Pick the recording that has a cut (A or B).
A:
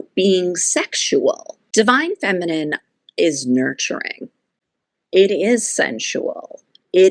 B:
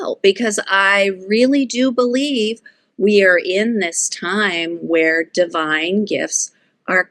A